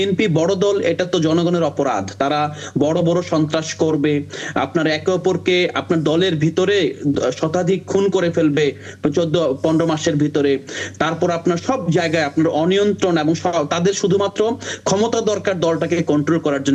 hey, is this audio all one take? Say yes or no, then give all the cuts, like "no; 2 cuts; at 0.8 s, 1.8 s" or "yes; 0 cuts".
yes; 0 cuts